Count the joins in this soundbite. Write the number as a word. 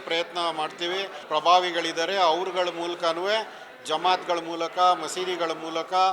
one